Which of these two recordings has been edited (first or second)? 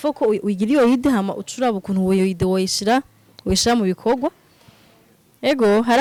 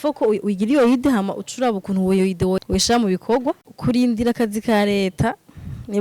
second